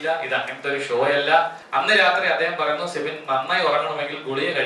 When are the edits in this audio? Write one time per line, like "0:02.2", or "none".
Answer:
0:01.6